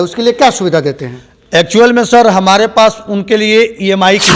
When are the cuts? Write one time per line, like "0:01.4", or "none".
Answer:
none